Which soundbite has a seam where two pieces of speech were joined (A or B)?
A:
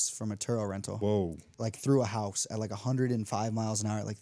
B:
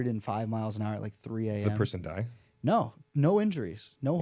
A